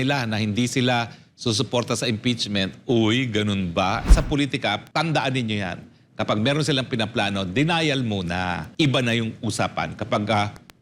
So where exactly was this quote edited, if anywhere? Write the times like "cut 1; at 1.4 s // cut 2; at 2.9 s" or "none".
cut 1; at 4.2 s // cut 2; at 8.6 s